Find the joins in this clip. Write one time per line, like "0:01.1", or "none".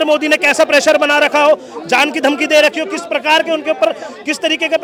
none